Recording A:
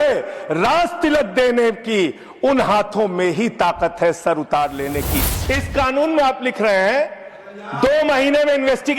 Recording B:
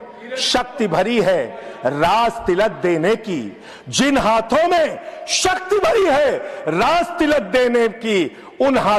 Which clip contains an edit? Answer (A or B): A